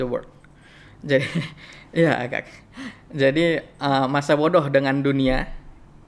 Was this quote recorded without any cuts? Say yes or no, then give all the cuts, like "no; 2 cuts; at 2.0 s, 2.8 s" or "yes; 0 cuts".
yes; 0 cuts